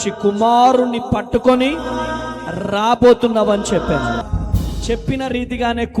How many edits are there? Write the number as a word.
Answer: one